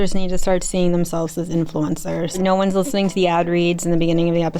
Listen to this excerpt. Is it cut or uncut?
cut